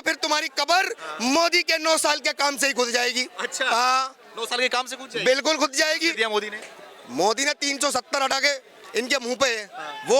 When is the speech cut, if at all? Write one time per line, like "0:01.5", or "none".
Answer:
none